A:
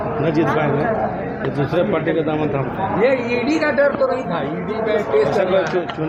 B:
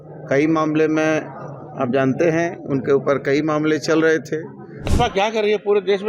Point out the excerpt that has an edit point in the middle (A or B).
B